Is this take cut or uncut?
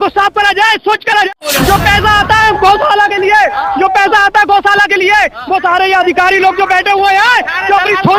cut